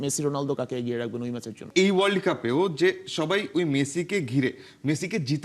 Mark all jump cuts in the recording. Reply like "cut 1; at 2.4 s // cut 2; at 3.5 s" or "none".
cut 1; at 1.6 s